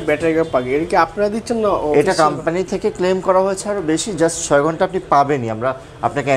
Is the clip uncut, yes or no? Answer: yes